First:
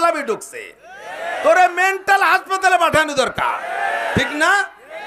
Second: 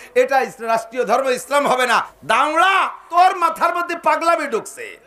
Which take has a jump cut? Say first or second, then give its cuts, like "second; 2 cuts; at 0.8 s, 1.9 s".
second; 2 cuts; at 2.1 s, 3.1 s